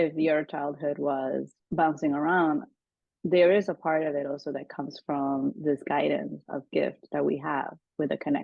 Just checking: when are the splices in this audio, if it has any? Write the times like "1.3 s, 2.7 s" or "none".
1.6 s